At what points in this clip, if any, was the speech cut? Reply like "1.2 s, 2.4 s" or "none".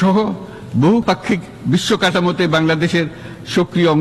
1.0 s